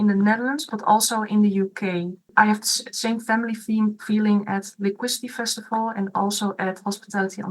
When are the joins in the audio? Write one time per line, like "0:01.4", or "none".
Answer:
0:02.3